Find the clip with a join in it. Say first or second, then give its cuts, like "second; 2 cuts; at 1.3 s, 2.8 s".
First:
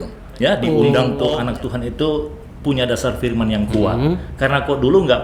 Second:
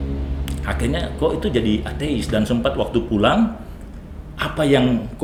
first; 1 cut; at 1.1 s